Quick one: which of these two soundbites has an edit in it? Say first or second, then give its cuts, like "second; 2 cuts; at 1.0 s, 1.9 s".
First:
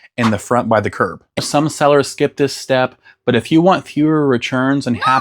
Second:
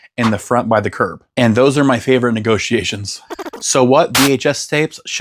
first; 1 cut; at 1.4 s